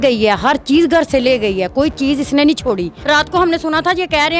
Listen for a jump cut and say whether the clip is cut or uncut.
cut